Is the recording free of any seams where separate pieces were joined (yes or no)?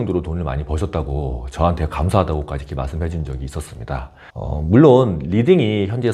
yes